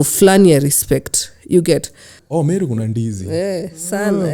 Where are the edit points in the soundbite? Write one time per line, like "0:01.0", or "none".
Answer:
0:02.2